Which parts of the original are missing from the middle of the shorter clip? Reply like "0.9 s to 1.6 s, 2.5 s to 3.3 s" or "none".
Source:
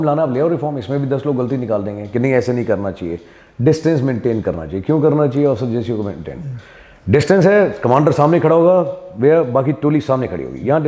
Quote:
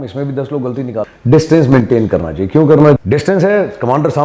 1.8 s to 3.4 s, 5.3 s to 7.0 s